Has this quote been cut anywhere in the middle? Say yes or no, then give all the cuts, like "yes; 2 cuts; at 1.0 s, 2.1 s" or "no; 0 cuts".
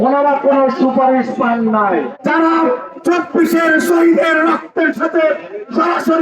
yes; 1 cut; at 2.1 s